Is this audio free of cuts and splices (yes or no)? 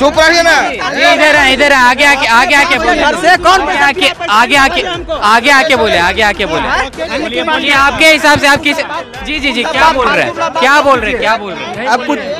yes